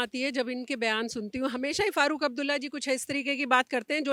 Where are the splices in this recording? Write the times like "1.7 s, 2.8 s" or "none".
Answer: none